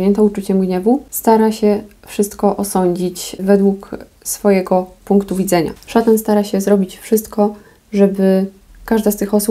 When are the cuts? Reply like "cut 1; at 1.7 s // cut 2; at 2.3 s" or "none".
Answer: cut 1; at 1.1 s // cut 2; at 3.4 s // cut 3; at 5.8 s